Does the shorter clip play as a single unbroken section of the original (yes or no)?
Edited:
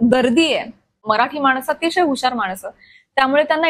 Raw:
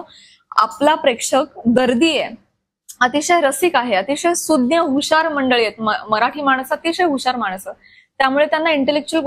no